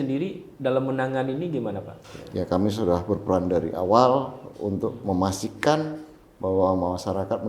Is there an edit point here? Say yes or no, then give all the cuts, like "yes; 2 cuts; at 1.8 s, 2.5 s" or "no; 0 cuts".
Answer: yes; 1 cut; at 1.9 s